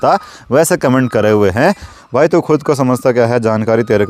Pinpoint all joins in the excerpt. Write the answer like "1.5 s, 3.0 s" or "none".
1.9 s